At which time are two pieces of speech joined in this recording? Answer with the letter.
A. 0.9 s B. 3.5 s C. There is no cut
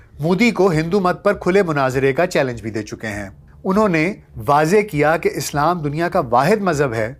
B